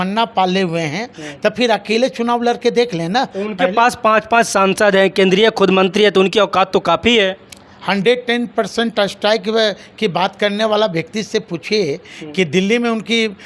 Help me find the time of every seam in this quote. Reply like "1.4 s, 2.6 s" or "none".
none